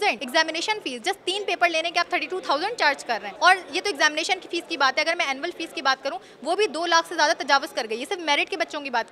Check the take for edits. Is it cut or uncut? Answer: uncut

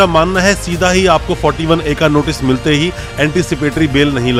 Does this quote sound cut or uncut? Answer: uncut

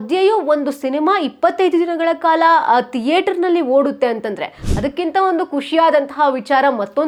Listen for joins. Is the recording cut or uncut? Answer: uncut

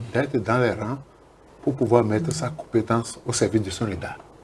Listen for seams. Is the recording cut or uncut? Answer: uncut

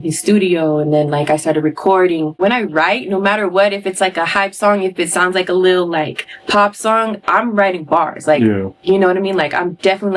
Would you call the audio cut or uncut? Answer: cut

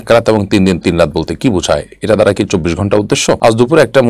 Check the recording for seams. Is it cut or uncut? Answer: uncut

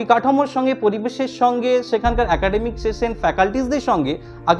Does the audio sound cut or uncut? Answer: uncut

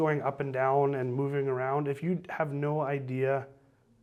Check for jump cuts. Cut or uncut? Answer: uncut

